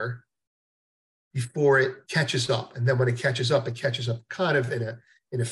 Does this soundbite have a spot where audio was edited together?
yes; 1 cut; at 2.0 s

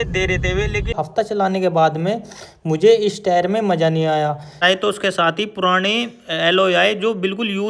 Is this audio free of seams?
no; 2 cuts; at 0.9 s, 4.6 s

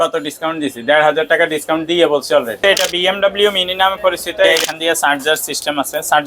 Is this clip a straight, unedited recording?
no; 2 cuts; at 2.6 s, 4.5 s

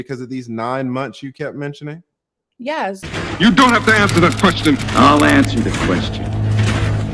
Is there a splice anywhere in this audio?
yes; 1 cut; at 3.0 s

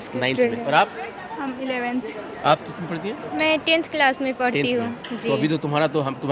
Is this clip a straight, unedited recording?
yes; 0 cuts

